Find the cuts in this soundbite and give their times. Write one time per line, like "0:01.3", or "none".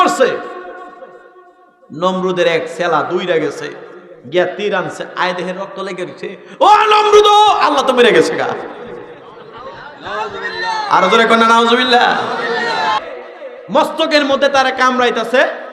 0:13.0